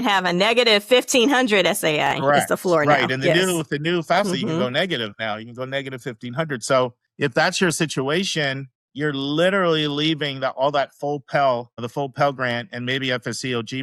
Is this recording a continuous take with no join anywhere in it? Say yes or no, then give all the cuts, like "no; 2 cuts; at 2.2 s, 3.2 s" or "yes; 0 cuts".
yes; 0 cuts